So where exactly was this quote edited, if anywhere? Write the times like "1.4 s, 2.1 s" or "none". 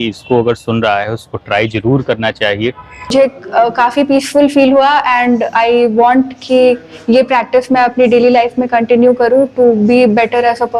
3.1 s

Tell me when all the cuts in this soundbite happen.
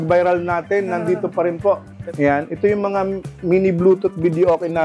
1.9 s

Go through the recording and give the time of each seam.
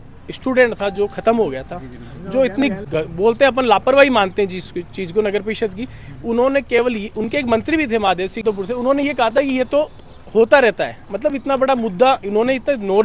8.4 s

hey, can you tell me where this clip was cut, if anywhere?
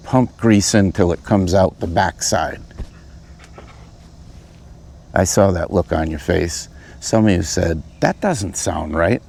none

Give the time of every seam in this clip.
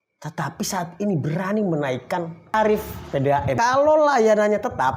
2.5 s, 3.6 s

